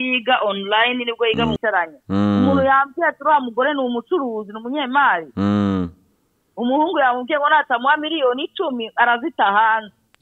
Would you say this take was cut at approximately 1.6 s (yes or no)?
yes